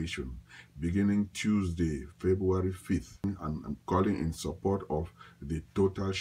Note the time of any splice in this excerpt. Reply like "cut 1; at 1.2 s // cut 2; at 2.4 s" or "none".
cut 1; at 3.2 s